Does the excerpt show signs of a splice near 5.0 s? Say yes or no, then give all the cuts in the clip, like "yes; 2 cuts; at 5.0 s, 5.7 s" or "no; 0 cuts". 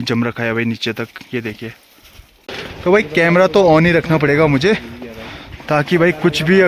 no; 1 cut; at 2.4 s